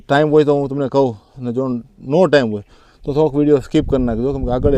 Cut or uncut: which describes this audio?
uncut